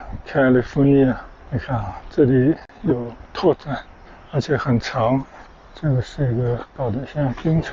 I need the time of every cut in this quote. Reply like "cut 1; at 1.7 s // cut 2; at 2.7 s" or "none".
cut 1; at 5.4 s